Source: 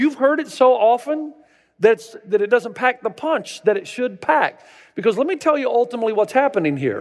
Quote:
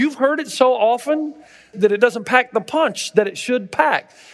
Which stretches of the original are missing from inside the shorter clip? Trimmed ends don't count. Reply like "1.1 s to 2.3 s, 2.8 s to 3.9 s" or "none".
1.6 s to 2.1 s